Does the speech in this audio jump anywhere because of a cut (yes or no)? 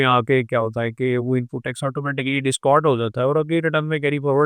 no